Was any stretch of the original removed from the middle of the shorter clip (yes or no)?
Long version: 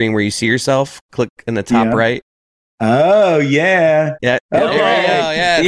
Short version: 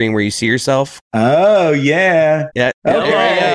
yes